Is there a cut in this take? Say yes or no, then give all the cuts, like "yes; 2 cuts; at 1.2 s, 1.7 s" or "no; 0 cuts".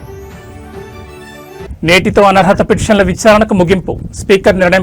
no; 0 cuts